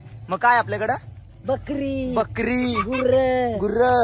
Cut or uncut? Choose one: uncut